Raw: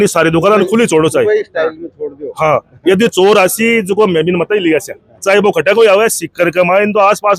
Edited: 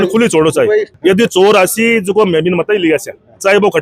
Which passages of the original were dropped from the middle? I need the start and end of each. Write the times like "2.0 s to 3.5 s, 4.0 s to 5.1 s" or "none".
1.5 s to 2.7 s

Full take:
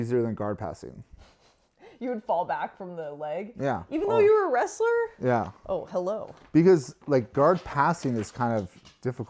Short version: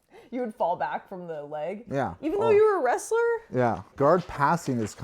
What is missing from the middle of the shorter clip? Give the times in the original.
5.6 s to 7.3 s

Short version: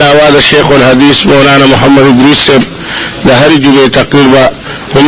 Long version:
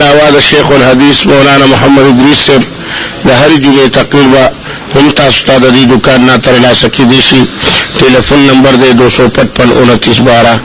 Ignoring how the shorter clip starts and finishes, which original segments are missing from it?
none

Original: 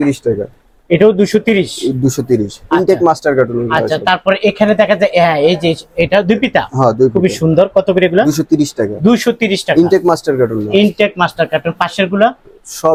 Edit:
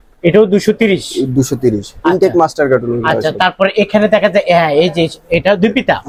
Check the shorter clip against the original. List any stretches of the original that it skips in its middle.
none

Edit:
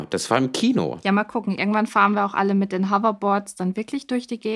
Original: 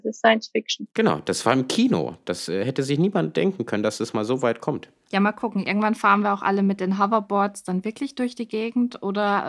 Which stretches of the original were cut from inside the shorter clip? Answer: 2.1 s to 5.0 s

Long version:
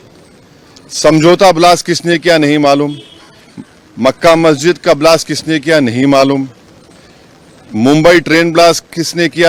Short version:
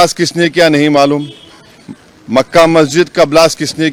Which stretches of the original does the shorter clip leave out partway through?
none

